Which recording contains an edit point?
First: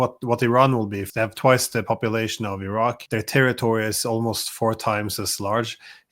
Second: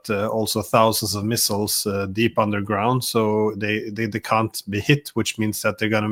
first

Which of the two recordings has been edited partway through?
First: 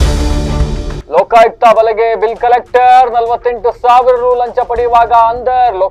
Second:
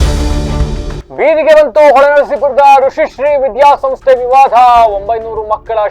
second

